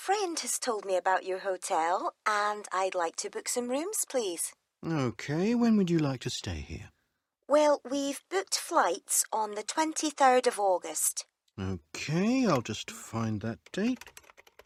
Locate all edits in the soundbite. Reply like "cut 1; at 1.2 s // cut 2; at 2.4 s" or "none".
none